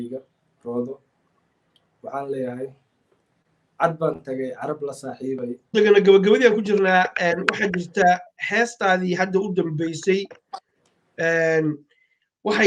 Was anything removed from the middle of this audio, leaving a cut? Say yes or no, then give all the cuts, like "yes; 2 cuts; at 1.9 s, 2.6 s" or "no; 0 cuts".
yes; 1 cut; at 5.7 s